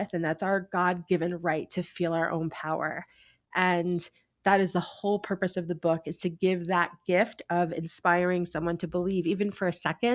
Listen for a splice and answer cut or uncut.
uncut